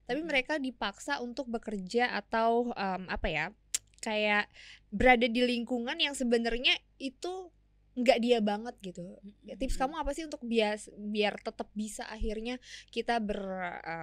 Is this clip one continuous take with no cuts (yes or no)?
yes